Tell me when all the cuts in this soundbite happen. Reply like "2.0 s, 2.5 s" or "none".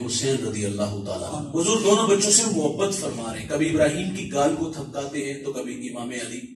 1.3 s